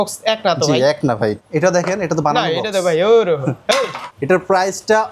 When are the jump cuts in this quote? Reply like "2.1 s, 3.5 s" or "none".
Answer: 1.4 s, 4.1 s